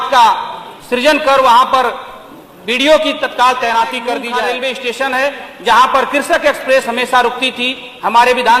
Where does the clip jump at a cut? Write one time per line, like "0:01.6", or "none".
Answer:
0:04.3